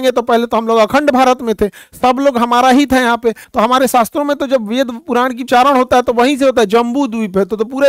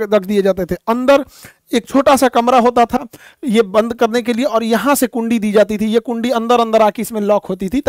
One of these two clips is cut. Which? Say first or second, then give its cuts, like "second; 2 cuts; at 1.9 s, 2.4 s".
first; 2 cuts; at 3.4 s, 5.4 s